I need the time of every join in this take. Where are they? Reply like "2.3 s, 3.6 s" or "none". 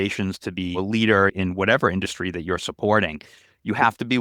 0.8 s, 1.3 s